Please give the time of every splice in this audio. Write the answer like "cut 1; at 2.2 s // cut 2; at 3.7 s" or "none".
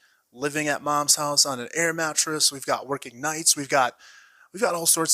none